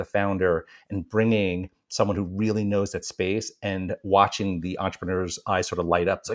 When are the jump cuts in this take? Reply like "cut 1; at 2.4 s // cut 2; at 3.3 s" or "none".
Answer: none